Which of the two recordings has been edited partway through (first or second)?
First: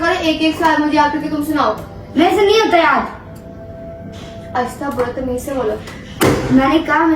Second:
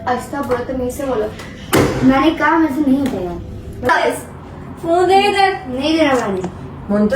second